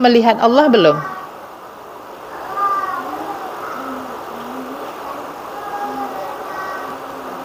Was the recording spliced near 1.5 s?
no; 0 cuts

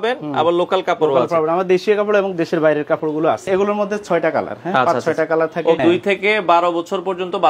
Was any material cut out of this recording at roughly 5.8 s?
yes; 2 cuts; at 3.5 s, 5.8 s

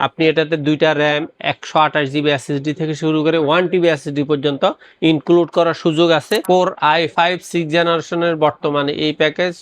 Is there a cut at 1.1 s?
no; 1 cut; at 6.4 s

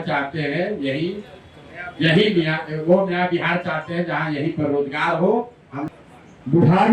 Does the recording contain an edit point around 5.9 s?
yes; 1 cut; at 5.9 s

